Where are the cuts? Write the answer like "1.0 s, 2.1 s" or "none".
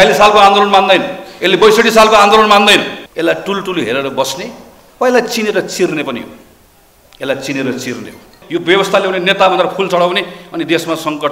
3.0 s, 8.4 s

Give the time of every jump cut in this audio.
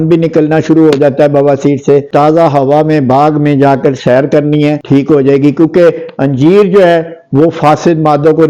2.1 s, 4.8 s

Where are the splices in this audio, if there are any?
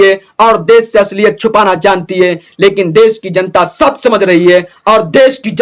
none

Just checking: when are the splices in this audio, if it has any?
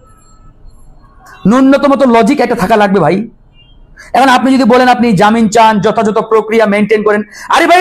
none

